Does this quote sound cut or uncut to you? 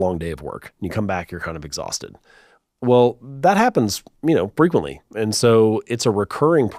uncut